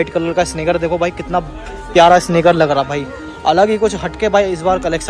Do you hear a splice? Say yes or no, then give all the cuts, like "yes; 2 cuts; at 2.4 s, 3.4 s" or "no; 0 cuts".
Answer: no; 0 cuts